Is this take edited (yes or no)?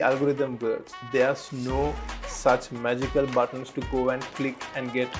yes